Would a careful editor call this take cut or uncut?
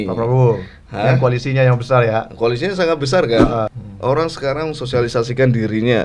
cut